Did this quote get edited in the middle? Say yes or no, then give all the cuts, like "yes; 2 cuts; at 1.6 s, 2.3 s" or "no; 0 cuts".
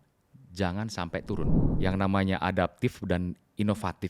yes; 1 cut; at 1.7 s